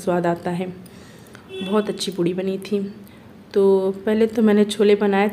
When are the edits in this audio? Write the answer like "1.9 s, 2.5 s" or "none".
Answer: none